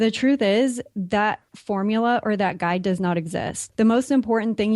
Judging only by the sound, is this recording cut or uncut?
cut